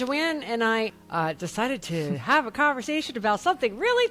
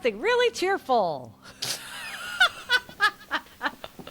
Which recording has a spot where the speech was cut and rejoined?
first; 1 cut; at 0.9 s

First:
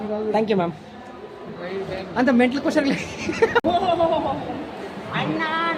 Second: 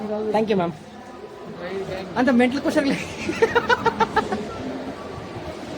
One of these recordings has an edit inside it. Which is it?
first; 1 cut; at 3.6 s

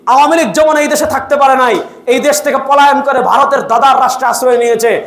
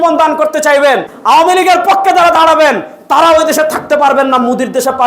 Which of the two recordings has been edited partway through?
second; 1 cut; at 1.1 s

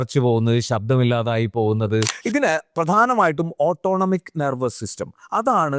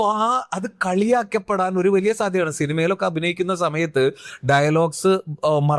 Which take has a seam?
first; 1 cut; at 2.2 s

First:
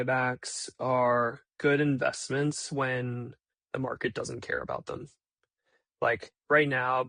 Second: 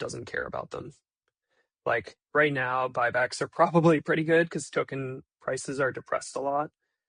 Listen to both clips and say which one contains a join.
first; 1 cut; at 1.4 s

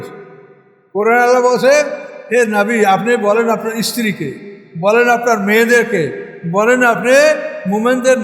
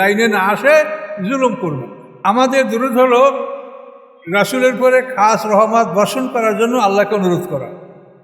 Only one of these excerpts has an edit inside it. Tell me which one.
second; 1 cut; at 2.2 s

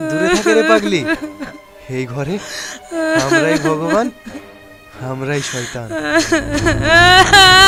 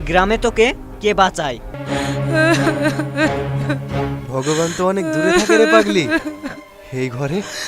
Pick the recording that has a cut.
second; 1 cut; at 1.7 s

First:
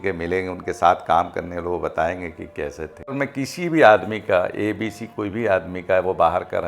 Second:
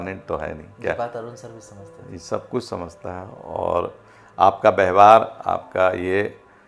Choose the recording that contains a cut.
first; 1 cut; at 3.1 s

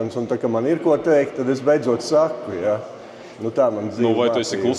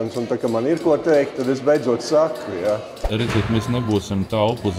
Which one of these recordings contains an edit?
second; 1 cut; at 3.0 s

